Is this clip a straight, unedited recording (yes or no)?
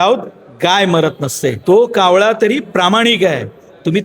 no